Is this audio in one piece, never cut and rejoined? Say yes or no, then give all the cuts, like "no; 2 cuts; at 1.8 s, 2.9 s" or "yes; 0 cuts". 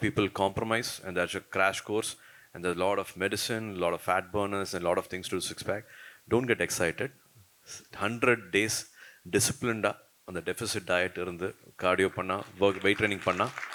yes; 0 cuts